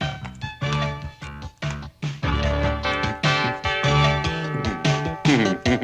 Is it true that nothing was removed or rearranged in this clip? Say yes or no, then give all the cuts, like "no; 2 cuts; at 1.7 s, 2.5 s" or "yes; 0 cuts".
yes; 0 cuts